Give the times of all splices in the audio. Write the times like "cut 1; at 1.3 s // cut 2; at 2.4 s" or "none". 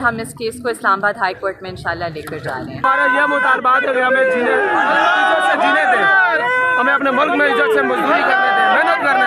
cut 1; at 2.8 s